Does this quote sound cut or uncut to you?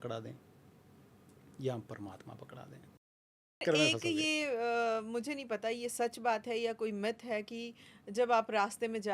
cut